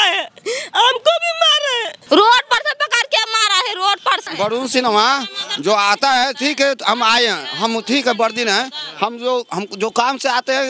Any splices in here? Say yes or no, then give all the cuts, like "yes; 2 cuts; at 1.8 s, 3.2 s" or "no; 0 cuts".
yes; 2 cuts; at 1.9 s, 4.2 s